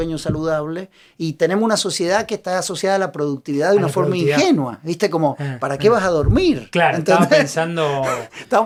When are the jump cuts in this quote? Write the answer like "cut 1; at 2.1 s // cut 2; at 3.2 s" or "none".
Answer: none